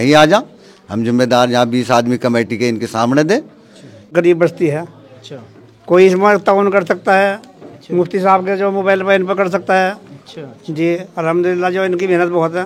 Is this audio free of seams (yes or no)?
no